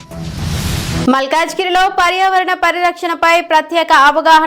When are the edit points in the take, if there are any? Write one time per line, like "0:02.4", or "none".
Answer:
0:01.1

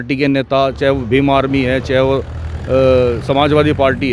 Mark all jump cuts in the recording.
none

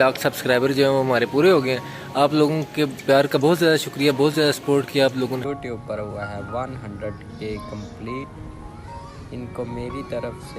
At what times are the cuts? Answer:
0:05.5

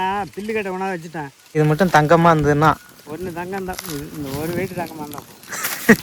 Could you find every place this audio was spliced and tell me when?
0:01.6

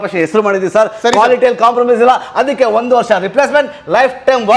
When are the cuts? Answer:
none

